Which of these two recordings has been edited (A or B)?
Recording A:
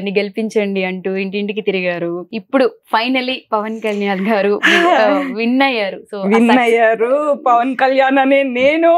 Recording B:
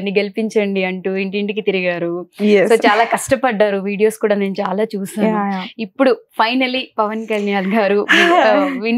A